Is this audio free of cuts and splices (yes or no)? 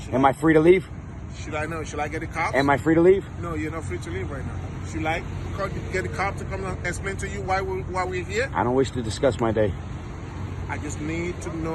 yes